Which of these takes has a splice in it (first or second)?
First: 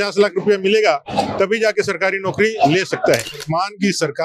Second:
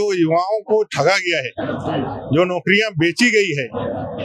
first